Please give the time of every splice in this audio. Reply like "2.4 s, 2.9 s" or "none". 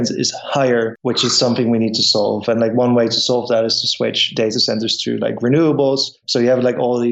1.0 s, 6.2 s